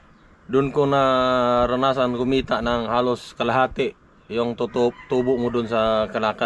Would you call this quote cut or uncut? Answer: uncut